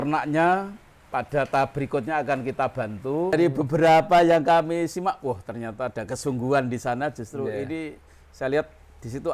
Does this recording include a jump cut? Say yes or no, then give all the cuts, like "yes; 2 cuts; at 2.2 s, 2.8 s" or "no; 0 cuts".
yes; 1 cut; at 3.3 s